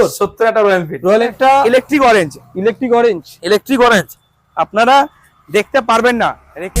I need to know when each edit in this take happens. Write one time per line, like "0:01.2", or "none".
0:01.3